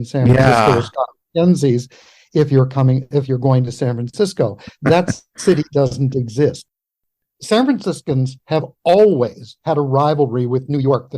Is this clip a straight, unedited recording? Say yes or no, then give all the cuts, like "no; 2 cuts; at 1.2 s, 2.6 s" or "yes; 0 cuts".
no; 1 cut; at 6.6 s